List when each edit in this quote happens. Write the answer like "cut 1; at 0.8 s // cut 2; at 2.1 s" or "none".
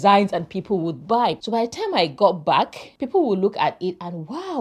cut 1; at 1.4 s